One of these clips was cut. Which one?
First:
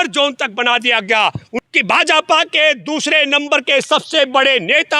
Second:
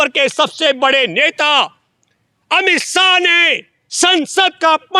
first; 1 cut; at 1.5 s

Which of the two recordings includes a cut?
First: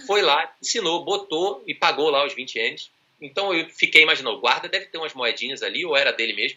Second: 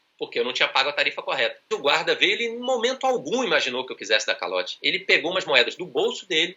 second; 1 cut; at 1.7 s

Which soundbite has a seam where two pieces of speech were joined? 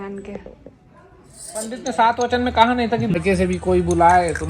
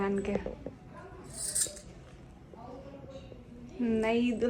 first; 1 cut; at 1.7 s

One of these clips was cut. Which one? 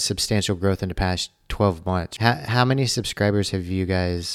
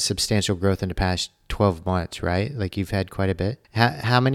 first; 1 cut; at 2.1 s

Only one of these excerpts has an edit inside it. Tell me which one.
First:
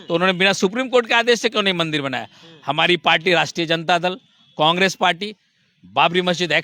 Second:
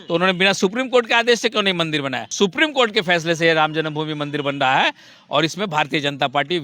second; 1 cut; at 2.3 s

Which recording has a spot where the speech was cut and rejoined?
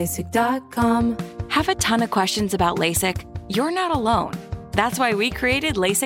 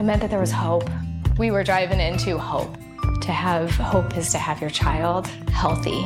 first; 1 cut; at 1.1 s

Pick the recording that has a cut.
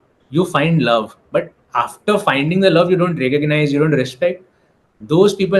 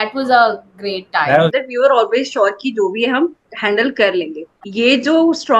second; 2 cuts; at 1.5 s, 4.4 s

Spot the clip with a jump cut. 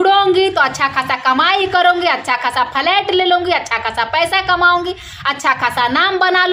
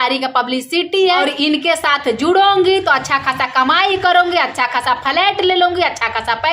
second; 1 cut; at 1.3 s

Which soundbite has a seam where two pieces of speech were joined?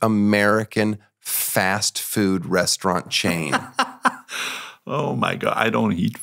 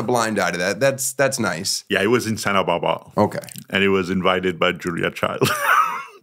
second; 1 cut; at 1.7 s

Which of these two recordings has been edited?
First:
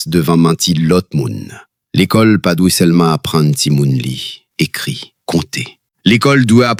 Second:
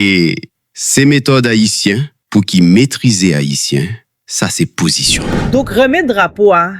second; 1 cut; at 5.3 s

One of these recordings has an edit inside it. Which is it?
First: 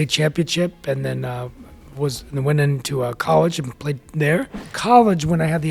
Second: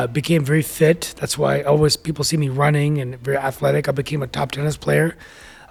first; 1 cut; at 4.8 s

